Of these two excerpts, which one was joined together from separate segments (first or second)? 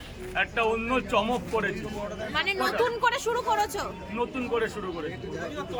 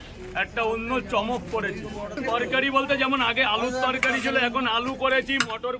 second